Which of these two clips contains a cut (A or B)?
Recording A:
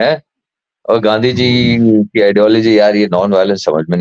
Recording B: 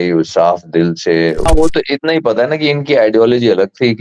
B